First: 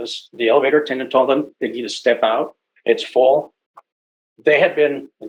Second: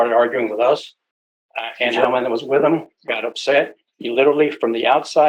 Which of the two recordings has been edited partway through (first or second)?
second